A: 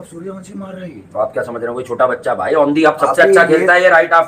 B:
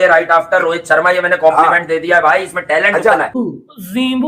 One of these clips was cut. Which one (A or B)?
B